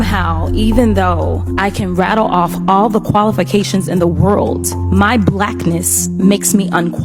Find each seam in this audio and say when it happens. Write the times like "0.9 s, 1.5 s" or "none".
none